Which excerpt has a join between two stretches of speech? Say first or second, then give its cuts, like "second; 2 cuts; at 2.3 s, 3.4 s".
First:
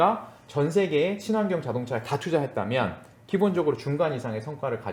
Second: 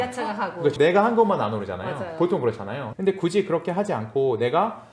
second; 1 cut; at 2.9 s